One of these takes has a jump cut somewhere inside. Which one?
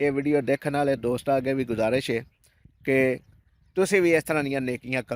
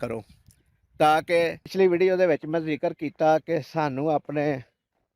second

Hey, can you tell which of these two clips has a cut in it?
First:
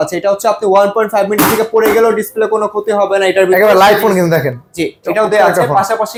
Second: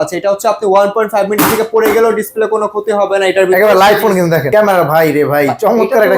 second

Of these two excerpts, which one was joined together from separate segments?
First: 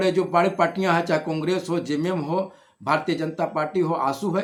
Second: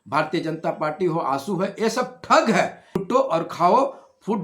second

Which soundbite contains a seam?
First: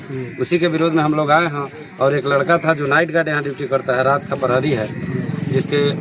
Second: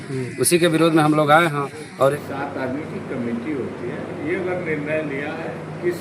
second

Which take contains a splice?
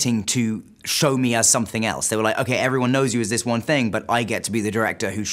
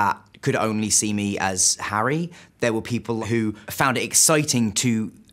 second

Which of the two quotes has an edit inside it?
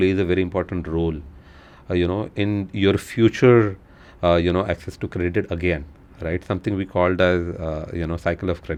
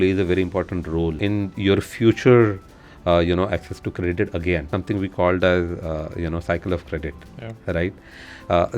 second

